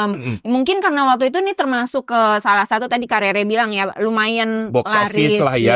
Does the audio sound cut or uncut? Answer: cut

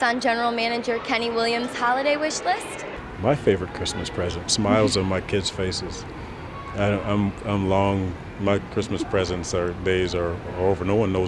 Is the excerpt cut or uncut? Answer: uncut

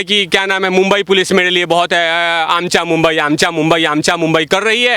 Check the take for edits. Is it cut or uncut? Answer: uncut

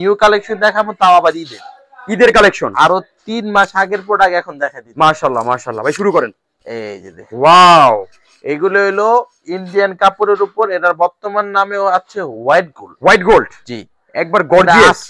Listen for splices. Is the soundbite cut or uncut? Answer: uncut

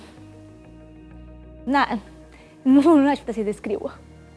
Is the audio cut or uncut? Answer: uncut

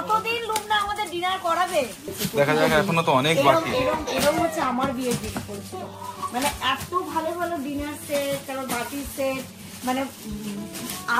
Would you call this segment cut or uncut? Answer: cut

